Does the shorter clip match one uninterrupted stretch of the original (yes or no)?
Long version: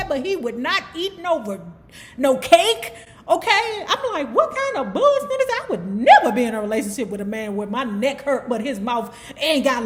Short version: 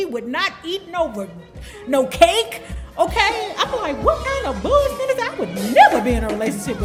yes